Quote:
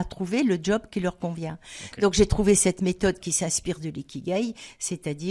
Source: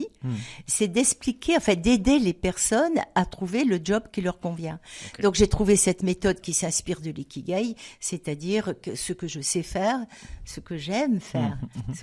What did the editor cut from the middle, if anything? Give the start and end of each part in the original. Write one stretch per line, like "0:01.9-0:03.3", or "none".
none